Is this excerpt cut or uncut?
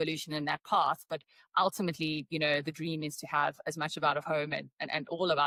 uncut